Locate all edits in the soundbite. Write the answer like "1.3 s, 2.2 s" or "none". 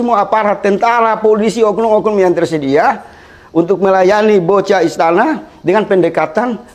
none